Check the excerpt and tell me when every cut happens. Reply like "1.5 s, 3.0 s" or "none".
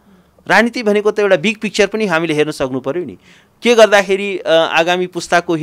none